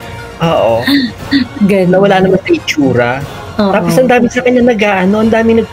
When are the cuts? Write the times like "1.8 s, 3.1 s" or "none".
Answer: none